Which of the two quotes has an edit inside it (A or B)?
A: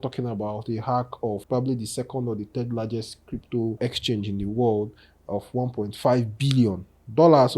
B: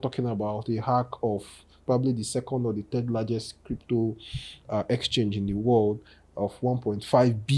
A